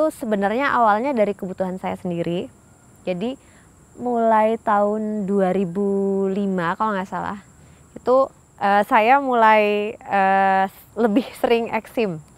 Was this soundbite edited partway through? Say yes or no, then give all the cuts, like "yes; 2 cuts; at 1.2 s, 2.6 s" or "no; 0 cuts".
no; 0 cuts